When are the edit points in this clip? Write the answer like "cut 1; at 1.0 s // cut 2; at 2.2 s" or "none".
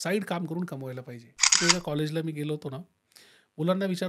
cut 1; at 1.6 s